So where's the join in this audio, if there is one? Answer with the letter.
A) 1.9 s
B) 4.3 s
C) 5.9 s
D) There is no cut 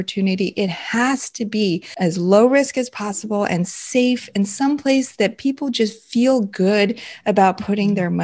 A